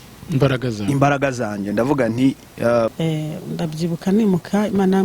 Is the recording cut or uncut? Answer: cut